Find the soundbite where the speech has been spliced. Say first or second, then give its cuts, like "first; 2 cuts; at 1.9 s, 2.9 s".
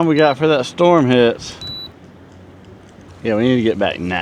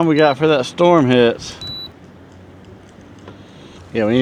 first; 1 cut; at 3.1 s